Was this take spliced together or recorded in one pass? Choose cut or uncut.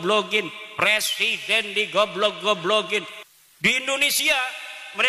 cut